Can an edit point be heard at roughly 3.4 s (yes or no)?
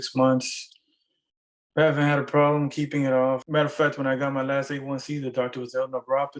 yes